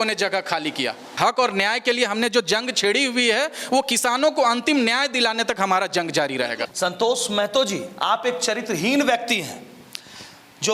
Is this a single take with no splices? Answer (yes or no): no